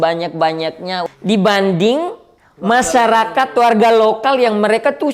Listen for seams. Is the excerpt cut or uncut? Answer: cut